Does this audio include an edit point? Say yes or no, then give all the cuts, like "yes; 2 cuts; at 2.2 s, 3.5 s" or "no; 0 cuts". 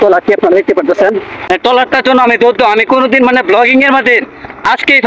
no; 0 cuts